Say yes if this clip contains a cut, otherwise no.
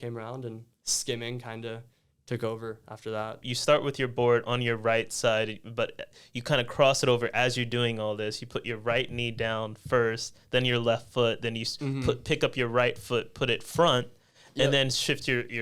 yes